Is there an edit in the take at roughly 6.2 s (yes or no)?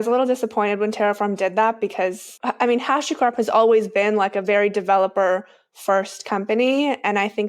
no